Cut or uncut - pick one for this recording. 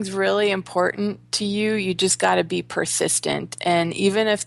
uncut